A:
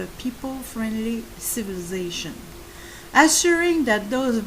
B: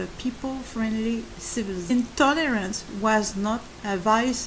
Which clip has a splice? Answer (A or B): A